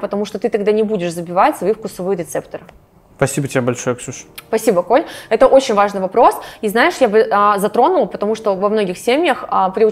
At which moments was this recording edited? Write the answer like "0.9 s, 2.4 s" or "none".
none